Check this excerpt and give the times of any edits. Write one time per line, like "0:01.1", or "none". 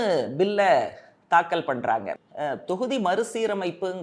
0:02.2